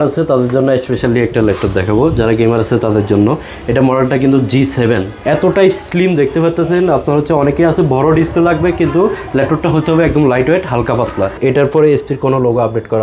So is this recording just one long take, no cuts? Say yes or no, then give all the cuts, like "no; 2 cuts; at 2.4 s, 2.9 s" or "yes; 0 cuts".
no; 2 cuts; at 5.1 s, 11.4 s